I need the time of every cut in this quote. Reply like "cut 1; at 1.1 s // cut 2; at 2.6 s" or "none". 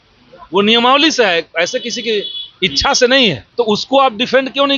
cut 1; at 3.4 s